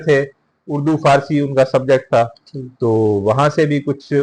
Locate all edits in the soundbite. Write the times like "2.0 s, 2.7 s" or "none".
none

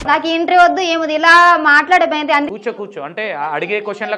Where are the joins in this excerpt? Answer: none

